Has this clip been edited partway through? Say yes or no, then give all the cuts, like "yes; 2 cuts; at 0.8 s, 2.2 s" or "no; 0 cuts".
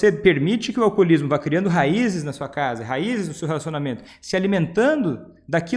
no; 0 cuts